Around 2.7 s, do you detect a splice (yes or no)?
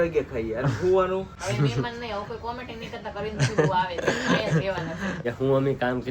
no